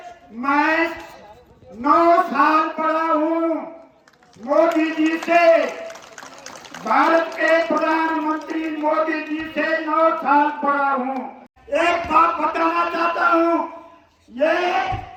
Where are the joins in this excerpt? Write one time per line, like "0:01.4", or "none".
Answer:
none